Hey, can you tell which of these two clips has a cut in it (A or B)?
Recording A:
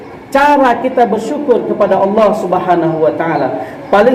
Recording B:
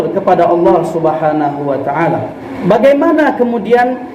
B